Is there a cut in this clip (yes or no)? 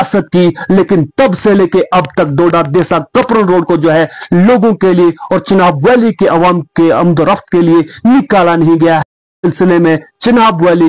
yes